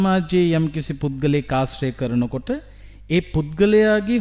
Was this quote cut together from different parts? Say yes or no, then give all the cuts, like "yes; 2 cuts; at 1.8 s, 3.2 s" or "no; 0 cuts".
no; 0 cuts